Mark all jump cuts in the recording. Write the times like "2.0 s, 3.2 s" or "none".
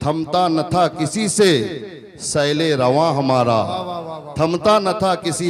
none